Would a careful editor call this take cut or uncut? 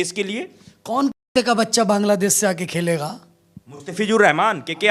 uncut